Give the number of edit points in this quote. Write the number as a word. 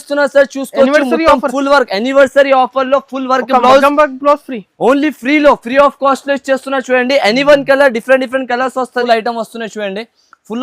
one